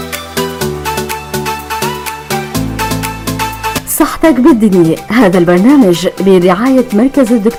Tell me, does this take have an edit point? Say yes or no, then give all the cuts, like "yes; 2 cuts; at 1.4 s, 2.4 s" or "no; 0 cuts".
no; 0 cuts